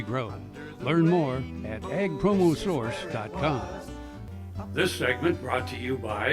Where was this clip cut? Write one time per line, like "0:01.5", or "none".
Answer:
0:03.8